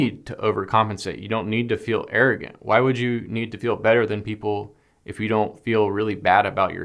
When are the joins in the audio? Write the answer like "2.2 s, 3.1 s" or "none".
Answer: none